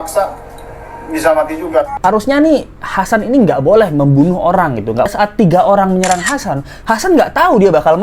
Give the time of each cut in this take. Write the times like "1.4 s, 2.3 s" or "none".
1.9 s, 5.1 s